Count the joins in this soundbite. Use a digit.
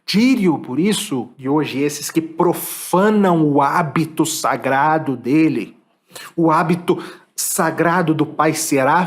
1